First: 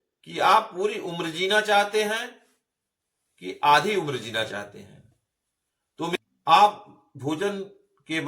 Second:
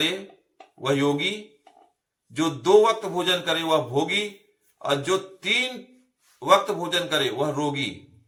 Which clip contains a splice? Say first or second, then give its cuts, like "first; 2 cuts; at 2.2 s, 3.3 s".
first; 1 cut; at 6.1 s